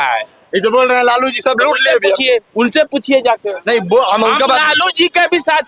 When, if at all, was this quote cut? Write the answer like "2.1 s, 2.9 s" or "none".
none